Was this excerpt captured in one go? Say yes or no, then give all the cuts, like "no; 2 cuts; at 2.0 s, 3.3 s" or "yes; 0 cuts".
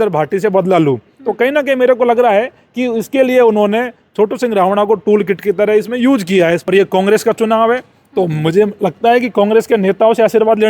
no; 1 cut; at 6.6 s